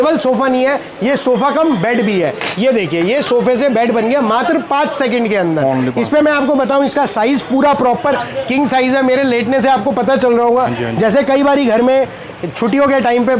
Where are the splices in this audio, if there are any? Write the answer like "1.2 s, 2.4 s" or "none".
none